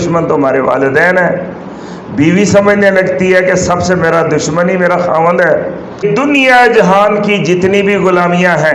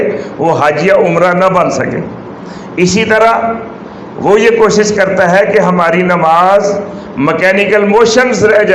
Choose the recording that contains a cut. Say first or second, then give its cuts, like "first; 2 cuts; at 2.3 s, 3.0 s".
first; 1 cut; at 6.0 s